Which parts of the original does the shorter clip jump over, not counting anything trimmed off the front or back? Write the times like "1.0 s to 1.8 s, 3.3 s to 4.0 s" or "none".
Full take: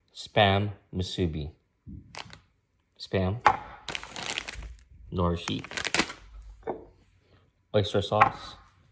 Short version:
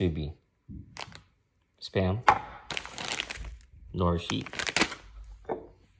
none